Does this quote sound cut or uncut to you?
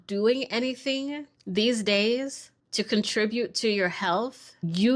uncut